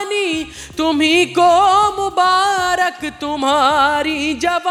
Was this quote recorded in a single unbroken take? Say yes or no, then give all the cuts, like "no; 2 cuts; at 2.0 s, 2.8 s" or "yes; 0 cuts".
yes; 0 cuts